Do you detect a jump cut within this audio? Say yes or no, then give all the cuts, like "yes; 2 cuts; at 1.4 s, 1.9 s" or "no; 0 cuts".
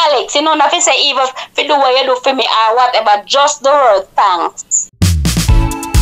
yes; 1 cut; at 4.8 s